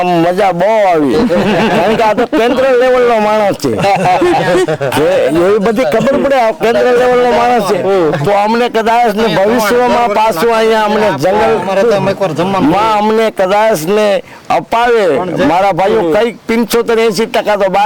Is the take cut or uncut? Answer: uncut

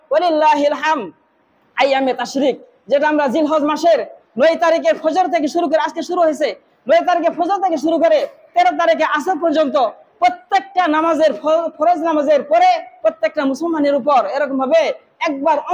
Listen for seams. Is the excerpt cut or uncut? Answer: uncut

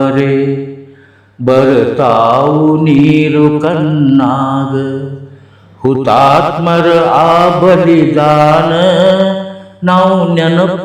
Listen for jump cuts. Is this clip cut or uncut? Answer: uncut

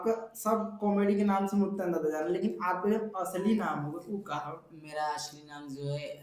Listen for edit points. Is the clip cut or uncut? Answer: uncut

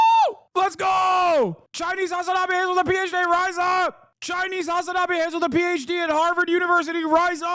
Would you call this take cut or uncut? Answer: uncut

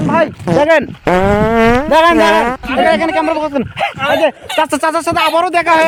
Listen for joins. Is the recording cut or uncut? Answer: uncut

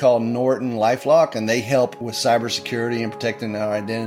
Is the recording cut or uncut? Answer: cut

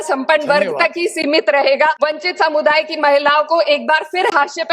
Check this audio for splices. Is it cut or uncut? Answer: cut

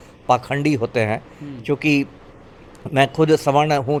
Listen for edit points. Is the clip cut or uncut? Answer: uncut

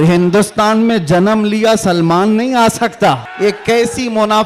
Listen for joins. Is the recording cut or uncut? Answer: cut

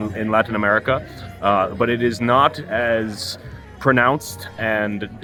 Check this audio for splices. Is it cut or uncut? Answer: uncut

